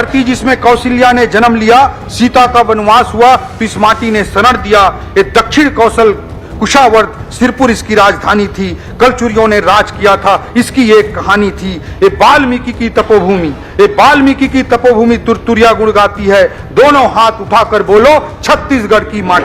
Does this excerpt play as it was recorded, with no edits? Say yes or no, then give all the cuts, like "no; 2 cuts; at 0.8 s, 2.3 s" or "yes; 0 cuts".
yes; 0 cuts